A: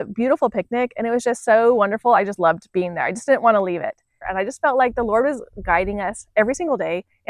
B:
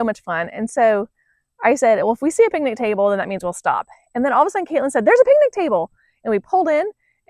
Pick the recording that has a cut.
A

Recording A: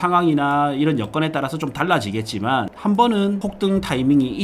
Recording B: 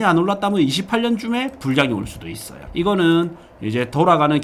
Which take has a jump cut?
A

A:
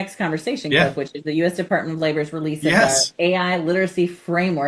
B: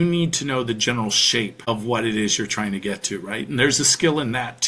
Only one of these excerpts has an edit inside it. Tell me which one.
B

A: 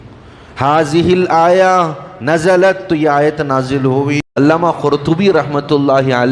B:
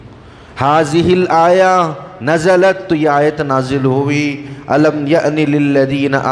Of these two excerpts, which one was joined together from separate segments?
A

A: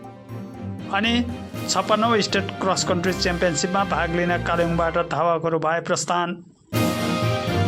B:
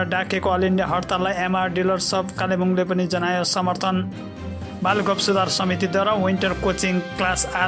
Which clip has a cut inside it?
A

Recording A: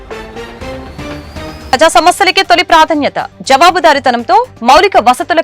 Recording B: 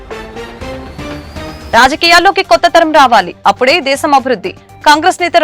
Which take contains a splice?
A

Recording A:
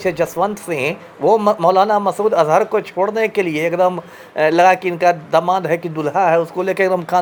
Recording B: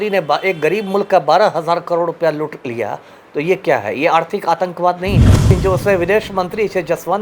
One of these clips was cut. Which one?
B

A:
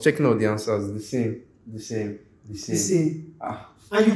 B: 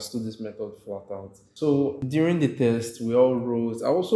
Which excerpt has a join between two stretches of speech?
B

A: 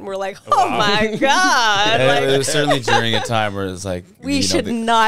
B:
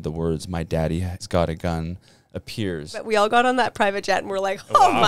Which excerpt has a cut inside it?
B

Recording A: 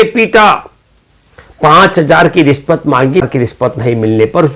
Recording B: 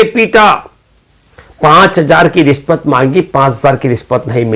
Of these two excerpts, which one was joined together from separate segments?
A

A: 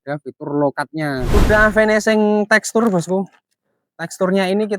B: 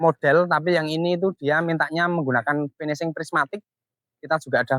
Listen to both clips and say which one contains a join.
A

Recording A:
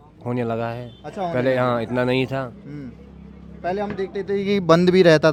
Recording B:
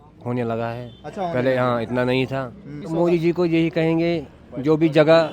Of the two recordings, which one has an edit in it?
B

